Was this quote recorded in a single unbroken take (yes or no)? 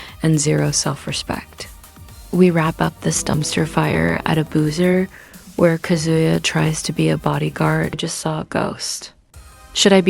no